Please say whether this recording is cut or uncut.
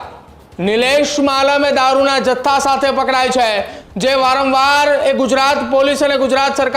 cut